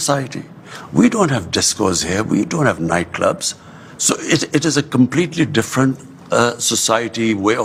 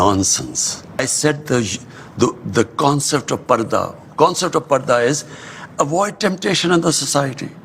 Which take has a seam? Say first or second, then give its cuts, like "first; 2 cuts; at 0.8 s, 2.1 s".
second; 1 cut; at 1.0 s